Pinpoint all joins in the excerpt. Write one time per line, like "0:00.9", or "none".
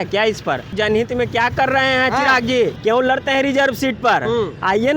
0:00.8
0:02.8